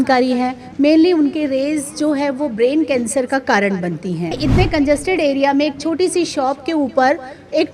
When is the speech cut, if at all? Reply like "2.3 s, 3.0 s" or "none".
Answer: 4.4 s